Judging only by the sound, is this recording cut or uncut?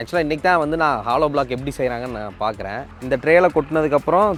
uncut